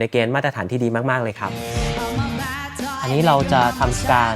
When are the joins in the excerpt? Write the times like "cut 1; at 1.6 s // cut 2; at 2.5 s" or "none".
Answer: cut 1; at 1.6 s